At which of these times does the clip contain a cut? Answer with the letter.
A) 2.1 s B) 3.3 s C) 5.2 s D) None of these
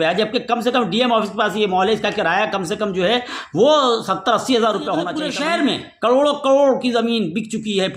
C